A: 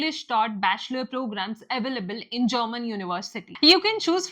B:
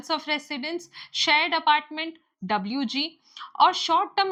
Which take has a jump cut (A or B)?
A